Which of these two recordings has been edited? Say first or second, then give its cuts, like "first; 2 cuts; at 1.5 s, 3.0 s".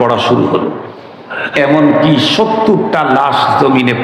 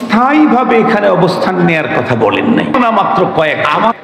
second; 1 cut; at 2.7 s